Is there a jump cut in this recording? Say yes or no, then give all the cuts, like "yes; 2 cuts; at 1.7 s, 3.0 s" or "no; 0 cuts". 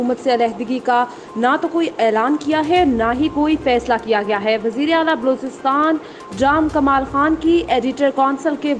no; 0 cuts